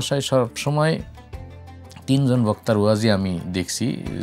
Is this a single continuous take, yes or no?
yes